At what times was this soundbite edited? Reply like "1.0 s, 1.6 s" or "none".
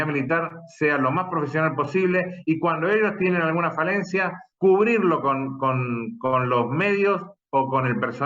4.4 s